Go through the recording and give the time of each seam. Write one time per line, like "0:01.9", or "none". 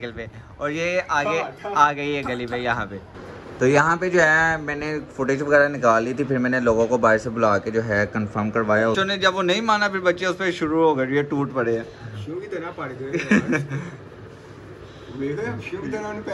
0:03.4
0:09.0